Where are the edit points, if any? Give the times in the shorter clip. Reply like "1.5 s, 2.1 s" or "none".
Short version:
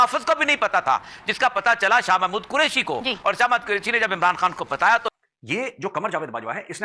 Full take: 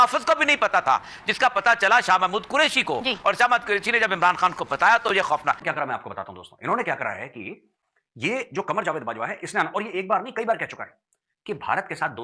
5.1 s

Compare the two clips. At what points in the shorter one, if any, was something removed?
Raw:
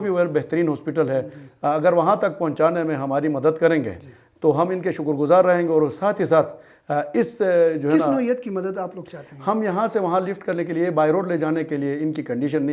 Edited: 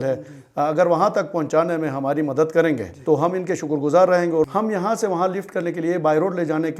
2.9 s, 4.4 s

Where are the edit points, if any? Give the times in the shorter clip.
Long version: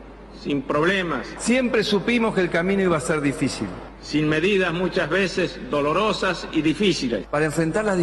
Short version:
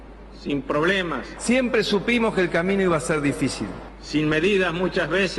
none

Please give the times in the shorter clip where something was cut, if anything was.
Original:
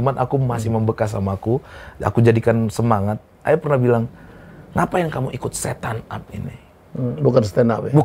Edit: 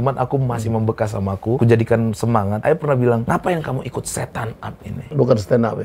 1.6 s, 2.6 s, 3.2 s, 5.1 s

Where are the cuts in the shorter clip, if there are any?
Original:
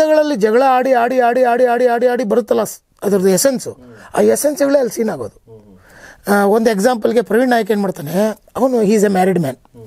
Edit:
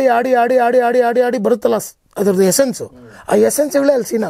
none

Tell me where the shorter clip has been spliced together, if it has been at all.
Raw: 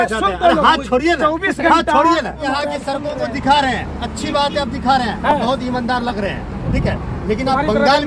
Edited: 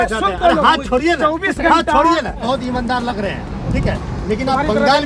2.4 s

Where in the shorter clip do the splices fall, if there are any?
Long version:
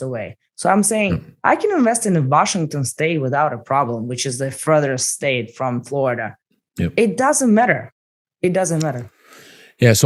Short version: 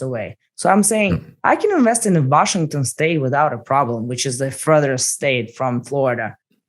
none

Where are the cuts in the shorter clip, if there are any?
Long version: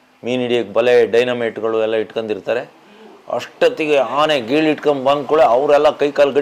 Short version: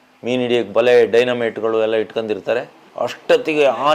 2.8 s

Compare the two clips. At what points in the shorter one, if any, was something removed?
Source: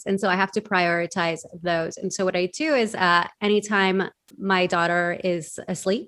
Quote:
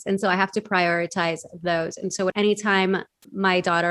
2.3 s

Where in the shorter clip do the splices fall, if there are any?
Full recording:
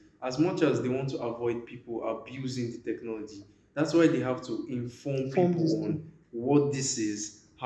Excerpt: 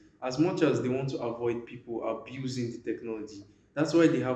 none

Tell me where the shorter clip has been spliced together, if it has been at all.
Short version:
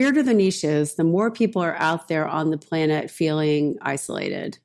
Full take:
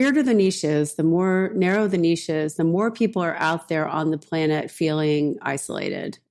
0.9 s

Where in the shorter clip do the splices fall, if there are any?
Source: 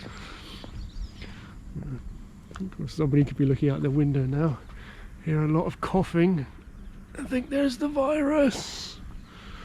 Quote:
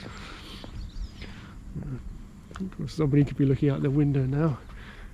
none

